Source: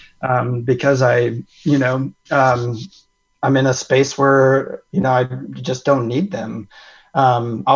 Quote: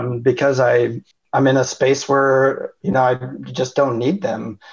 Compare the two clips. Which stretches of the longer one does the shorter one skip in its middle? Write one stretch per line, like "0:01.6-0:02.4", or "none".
0:01.5-0:03.1